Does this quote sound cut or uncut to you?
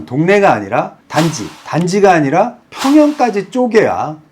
uncut